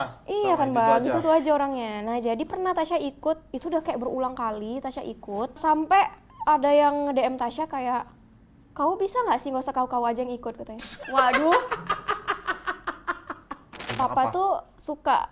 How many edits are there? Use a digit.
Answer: 1